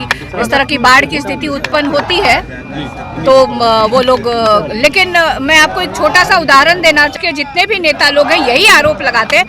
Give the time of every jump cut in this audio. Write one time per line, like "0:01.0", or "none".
0:07.1